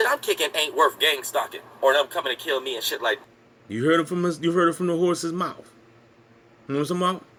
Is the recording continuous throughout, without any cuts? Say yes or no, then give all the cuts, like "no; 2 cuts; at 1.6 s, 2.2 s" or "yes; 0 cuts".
yes; 0 cuts